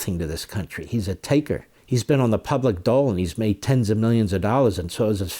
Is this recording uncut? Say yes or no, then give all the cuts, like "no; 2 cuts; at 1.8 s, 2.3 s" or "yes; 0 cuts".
no; 1 cut; at 1.7 s